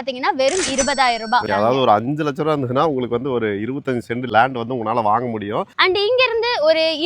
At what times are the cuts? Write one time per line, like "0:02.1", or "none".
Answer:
0:01.5
0:04.3
0:05.7